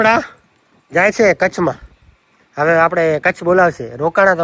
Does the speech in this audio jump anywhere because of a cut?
no; 0 cuts

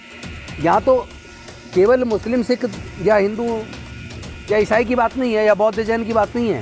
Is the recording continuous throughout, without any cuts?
yes; 0 cuts

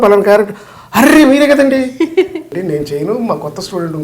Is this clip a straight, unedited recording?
no; 1 cut; at 2.5 s

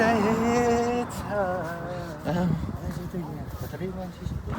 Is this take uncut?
no; 1 cut; at 1.8 s

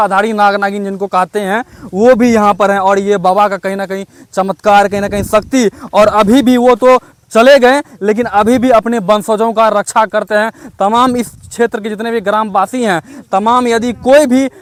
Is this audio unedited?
yes; 0 cuts

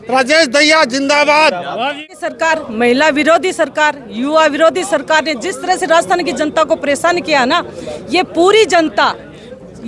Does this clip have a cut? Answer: yes; 1 cut; at 2.1 s

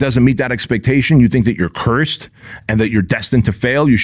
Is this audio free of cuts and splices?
yes; 0 cuts

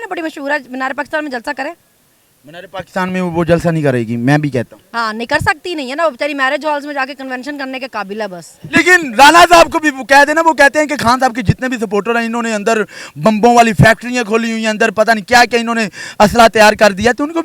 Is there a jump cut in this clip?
no; 0 cuts

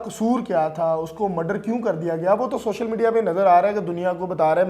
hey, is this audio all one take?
yes; 0 cuts

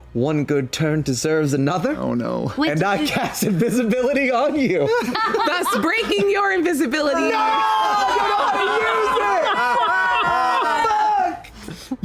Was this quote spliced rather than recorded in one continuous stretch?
no; 0 cuts

